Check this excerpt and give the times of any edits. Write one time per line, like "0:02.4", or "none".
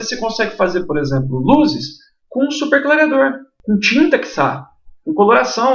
0:03.5

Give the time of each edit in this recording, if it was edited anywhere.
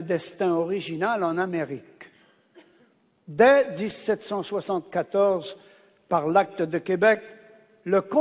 none

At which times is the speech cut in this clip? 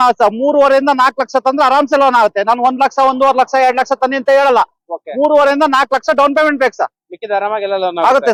none

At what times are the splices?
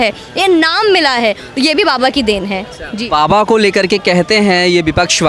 none

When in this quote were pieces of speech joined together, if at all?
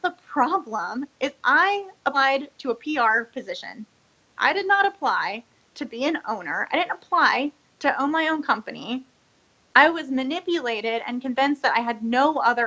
none

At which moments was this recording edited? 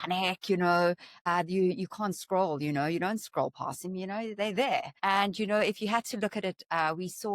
0:01.3
0:04.9

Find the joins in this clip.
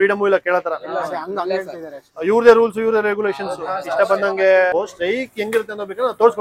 0:04.7

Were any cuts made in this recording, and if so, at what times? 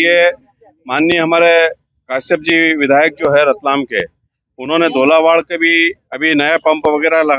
none

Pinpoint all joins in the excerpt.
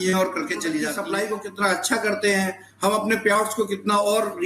0:00.9

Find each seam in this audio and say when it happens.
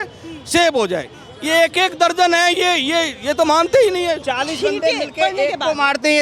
0:04.2

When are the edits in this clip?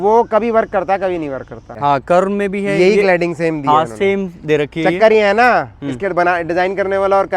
0:01.7

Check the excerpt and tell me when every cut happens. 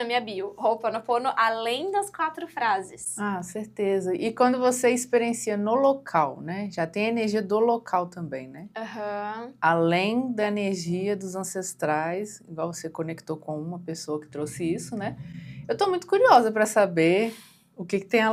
none

